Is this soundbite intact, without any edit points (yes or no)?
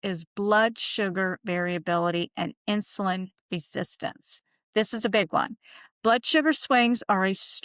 yes